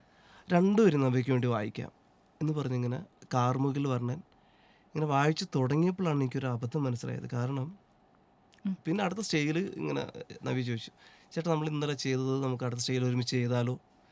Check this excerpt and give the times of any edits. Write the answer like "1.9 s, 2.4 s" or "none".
8.5 s